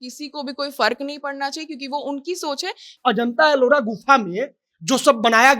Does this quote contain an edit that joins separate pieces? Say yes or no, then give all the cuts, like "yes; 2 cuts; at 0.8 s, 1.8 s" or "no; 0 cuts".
yes; 1 cut; at 2.9 s